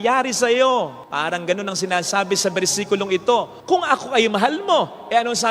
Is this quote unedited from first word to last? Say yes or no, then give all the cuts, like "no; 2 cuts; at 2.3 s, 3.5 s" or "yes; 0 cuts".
yes; 0 cuts